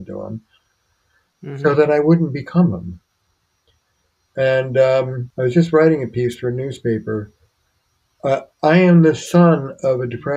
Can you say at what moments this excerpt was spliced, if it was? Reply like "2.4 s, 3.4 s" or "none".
5.2 s